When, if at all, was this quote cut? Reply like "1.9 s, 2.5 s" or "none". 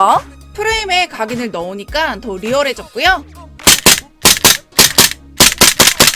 3.4 s